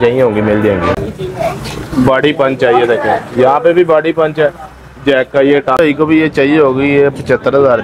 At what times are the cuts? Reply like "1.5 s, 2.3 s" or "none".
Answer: 1.0 s, 5.8 s